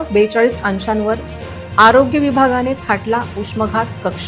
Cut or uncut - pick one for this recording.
uncut